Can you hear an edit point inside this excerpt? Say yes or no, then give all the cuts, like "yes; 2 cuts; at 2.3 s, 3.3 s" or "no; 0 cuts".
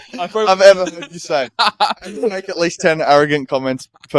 no; 0 cuts